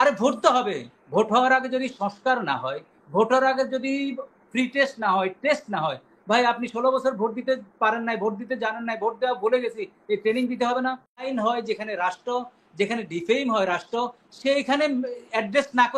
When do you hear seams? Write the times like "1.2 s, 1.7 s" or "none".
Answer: 11.2 s